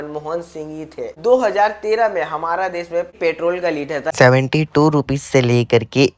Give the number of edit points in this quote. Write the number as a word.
zero